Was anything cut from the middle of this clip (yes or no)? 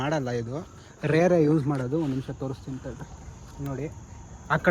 no